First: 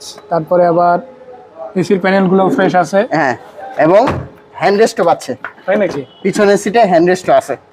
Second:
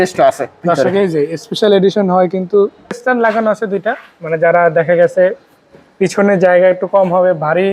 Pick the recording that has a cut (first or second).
second